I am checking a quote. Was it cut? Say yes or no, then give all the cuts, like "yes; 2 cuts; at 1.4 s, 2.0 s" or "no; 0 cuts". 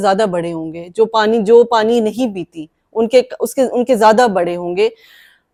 no; 0 cuts